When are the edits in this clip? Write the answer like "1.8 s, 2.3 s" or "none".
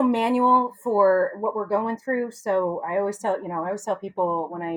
none